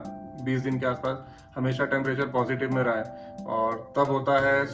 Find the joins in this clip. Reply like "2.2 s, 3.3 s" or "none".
3.3 s